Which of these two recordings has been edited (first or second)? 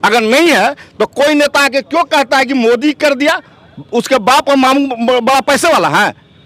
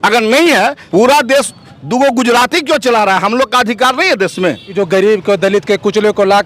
second